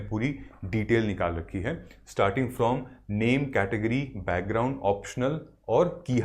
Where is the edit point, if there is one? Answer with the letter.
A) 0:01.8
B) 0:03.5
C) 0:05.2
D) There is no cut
D